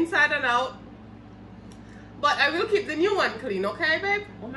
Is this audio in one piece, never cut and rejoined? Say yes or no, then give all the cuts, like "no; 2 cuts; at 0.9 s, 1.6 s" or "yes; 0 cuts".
yes; 0 cuts